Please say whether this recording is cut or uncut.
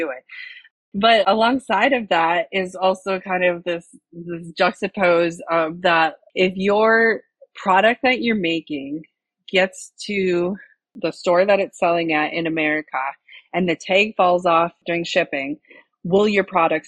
cut